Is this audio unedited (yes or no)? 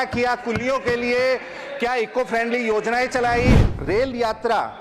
no